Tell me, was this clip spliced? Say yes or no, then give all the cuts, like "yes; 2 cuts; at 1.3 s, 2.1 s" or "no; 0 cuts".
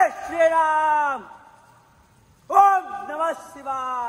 no; 0 cuts